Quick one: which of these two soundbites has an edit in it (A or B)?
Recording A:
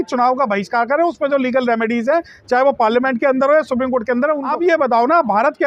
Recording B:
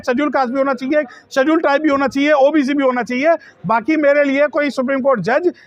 A